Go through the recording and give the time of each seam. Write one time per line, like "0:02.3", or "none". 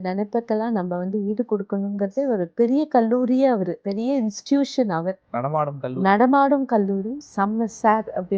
0:02.5
0:03.8
0:07.2

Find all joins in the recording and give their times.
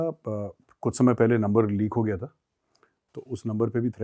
none

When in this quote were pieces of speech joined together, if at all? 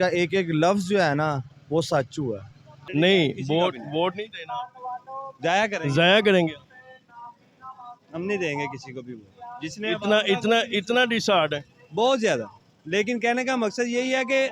0:02.8

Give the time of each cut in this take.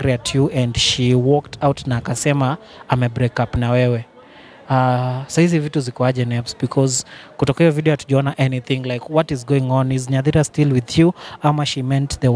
none

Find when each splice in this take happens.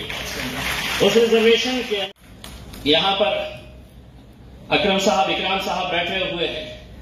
0:02.1

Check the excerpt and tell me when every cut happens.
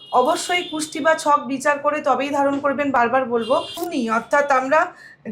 0:03.8

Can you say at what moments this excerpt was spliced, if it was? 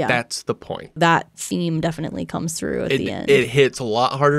0:01.0

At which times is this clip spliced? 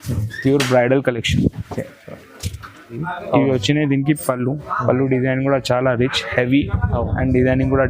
0:03.0

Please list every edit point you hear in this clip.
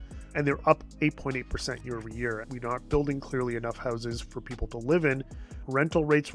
0:02.4

